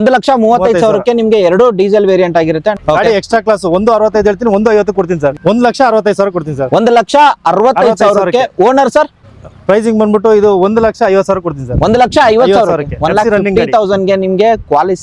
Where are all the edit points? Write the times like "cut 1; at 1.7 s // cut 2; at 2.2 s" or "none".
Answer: cut 1; at 2.8 s // cut 2; at 5.3 s // cut 3; at 9.3 s